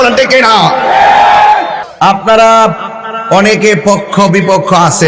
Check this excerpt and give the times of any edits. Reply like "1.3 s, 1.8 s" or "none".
2.2 s